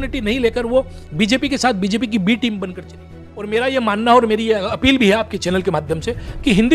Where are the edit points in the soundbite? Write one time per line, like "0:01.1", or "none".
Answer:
0:03.5